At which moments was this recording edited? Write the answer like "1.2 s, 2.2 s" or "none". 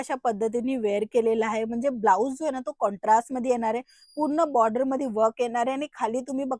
none